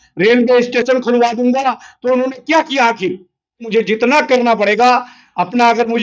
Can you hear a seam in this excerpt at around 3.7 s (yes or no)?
yes